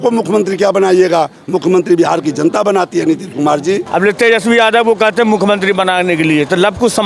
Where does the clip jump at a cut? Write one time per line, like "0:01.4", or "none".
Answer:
0:03.9